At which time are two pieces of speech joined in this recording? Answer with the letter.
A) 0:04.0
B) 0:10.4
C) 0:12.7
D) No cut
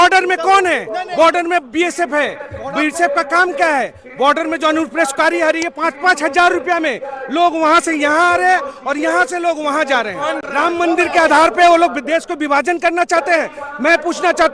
B